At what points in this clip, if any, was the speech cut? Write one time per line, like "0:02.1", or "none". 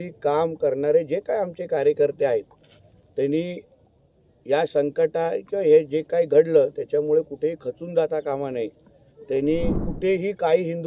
0:09.8

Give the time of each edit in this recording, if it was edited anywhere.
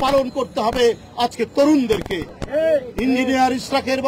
none

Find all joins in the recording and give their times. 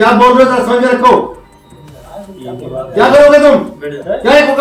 none

